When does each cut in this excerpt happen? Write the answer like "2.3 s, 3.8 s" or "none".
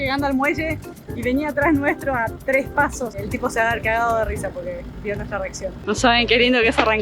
3.2 s, 5.8 s